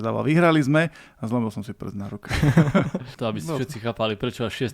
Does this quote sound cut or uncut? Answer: cut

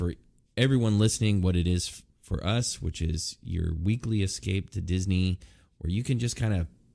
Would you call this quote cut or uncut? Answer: uncut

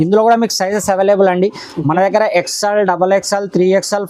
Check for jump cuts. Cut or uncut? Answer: uncut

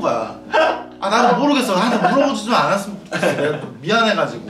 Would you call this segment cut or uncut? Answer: uncut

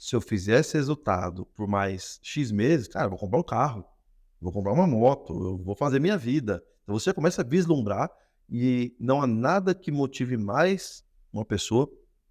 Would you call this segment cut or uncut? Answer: uncut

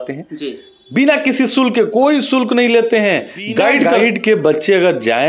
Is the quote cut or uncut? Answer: cut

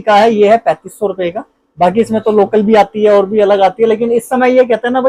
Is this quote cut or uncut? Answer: uncut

